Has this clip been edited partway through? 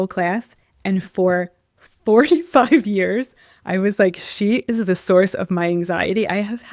no; 0 cuts

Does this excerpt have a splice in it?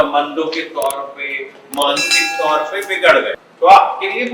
yes; 1 cut; at 3.4 s

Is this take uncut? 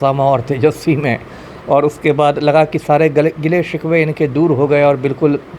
yes; 0 cuts

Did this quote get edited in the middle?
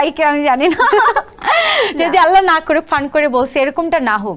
no; 0 cuts

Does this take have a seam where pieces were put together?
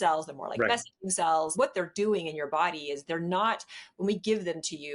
yes; 1 cut; at 1.5 s

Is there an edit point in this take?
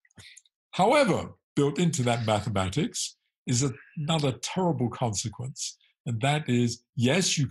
yes; 1 cut; at 1.4 s

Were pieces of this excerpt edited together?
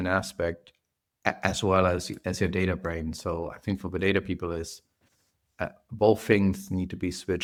no; 0 cuts

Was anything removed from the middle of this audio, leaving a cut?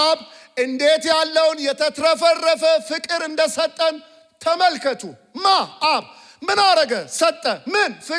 no; 0 cuts

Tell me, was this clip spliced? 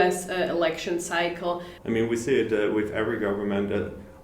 yes; 1 cut; at 1.7 s

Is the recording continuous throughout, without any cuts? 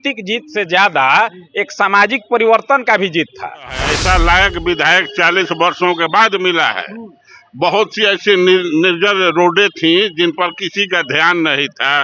no; 1 cut; at 3.9 s

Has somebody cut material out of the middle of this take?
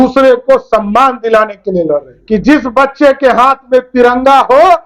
yes; 1 cut; at 2.1 s

